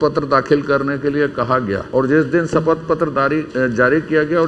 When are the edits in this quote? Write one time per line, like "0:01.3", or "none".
0:01.8